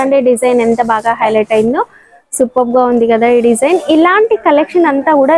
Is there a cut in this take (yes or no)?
no